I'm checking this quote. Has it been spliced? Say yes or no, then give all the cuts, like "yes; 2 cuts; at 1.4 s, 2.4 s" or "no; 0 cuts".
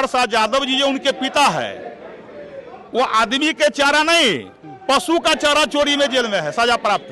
no; 0 cuts